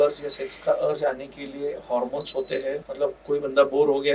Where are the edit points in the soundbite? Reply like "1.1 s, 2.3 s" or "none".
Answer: 2.9 s